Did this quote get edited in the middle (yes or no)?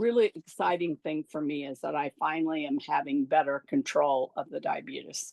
no